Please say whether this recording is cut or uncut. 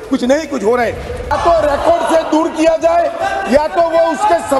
cut